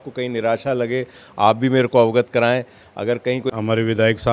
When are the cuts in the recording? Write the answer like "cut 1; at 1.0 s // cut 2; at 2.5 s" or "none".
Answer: cut 1; at 3.3 s